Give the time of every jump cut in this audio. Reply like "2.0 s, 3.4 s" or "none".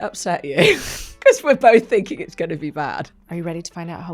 3.0 s

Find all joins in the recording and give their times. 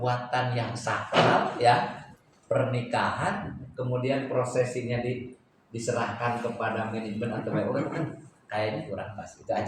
none

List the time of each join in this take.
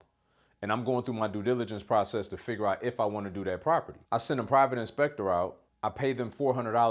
4.0 s, 5.6 s

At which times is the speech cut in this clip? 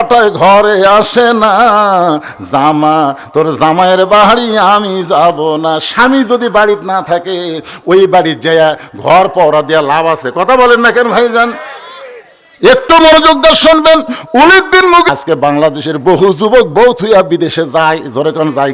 15.1 s

